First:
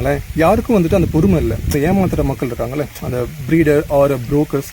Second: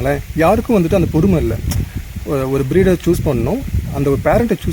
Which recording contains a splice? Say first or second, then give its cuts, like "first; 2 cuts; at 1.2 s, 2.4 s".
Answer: first; 1 cut; at 1.7 s